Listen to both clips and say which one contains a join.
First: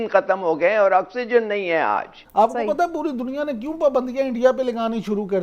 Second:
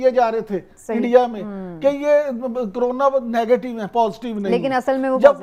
first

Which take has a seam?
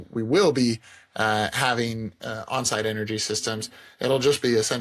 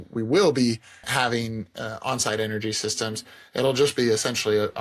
second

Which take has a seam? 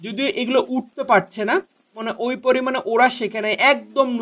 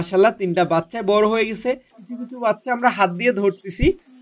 second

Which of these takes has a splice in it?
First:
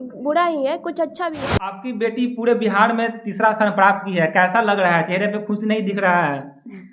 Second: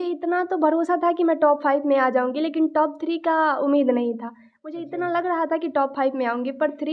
first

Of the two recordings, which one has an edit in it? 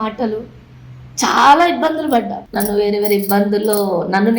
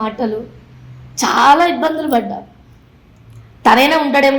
first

